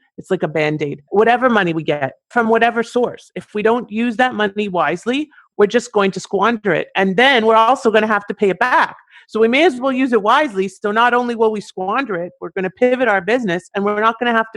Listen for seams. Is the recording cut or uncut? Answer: cut